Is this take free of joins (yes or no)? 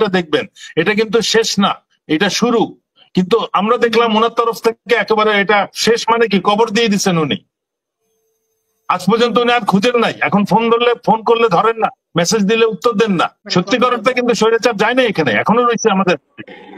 no